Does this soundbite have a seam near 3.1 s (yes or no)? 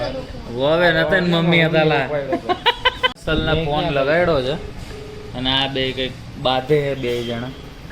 yes